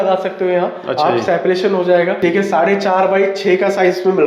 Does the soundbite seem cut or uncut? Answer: cut